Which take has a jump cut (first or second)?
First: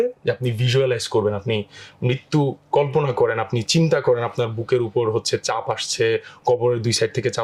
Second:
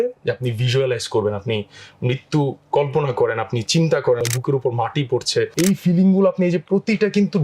second